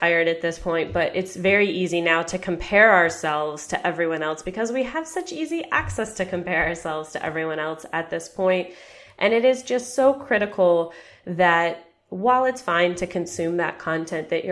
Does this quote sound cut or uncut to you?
uncut